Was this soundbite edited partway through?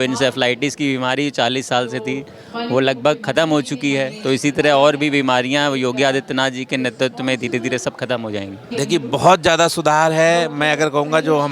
yes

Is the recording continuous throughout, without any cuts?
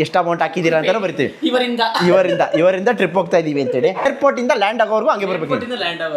no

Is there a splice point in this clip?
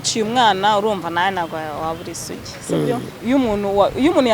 yes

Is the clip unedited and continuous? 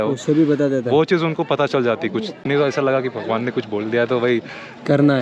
no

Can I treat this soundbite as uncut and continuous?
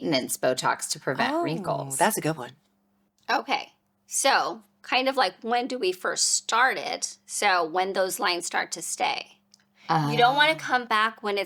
yes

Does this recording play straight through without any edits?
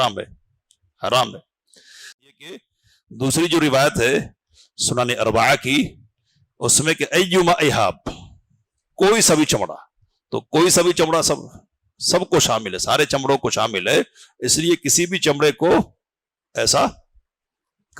no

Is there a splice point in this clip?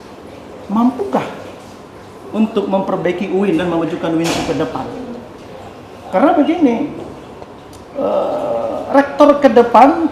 no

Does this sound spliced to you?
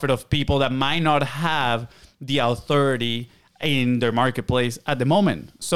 no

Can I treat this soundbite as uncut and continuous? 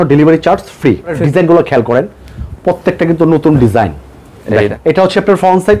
no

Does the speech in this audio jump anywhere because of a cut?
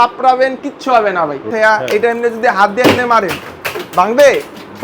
yes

